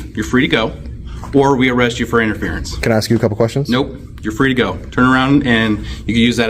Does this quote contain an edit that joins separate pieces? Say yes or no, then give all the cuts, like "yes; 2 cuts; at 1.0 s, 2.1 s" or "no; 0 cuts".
no; 0 cuts